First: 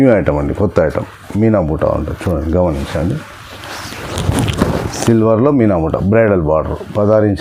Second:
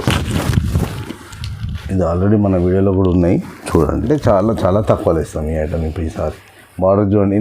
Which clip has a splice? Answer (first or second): second